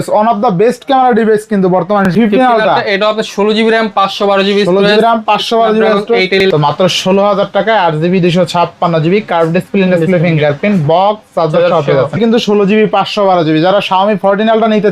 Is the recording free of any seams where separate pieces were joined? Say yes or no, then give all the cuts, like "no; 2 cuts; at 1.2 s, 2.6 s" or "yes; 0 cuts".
no; 3 cuts; at 2.1 s, 6.4 s, 12.2 s